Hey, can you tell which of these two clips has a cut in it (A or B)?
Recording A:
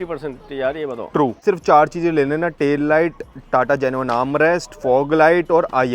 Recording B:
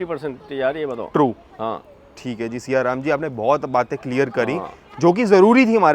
A